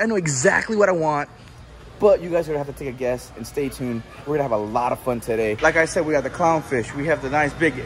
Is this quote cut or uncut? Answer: cut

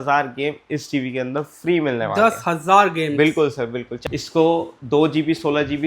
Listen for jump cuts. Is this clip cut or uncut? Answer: cut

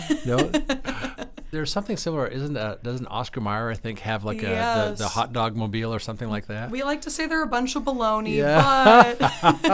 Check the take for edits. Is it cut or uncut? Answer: cut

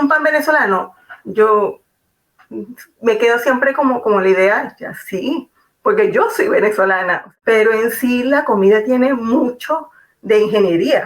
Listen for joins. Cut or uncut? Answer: cut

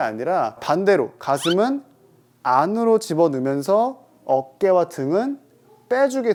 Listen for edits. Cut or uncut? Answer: uncut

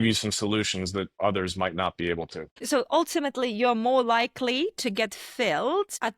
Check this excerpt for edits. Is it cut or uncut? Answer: cut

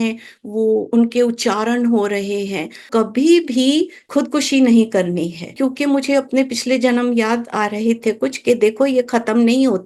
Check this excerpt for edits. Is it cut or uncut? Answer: cut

